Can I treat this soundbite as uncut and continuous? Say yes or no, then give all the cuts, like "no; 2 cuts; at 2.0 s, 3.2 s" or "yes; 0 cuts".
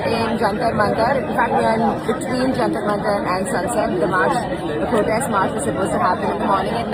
yes; 0 cuts